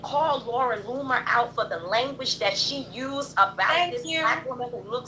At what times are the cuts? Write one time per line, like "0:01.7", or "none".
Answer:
none